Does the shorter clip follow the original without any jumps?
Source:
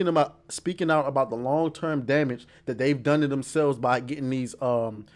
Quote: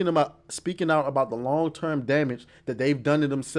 yes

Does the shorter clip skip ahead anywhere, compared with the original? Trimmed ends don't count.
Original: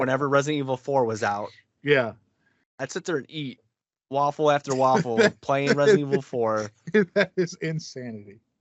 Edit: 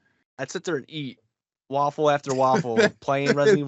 no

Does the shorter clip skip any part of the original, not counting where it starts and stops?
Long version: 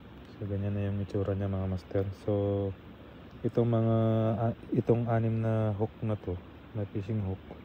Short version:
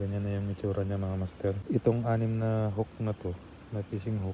yes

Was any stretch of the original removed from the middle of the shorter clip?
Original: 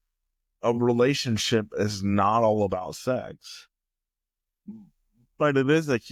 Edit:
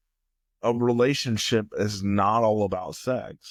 no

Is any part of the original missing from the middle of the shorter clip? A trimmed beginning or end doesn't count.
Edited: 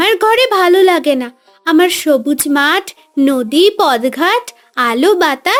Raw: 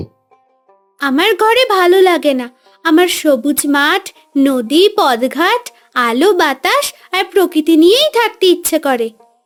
no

